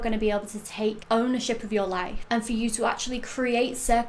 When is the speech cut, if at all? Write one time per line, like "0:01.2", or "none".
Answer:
0:01.0
0:02.1